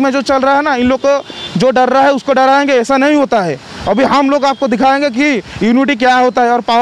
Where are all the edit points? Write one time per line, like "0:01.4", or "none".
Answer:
none